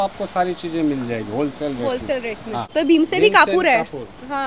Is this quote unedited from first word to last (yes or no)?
no